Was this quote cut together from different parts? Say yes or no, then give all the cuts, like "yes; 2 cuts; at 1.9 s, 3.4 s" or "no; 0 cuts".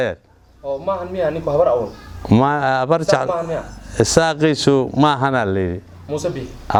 no; 0 cuts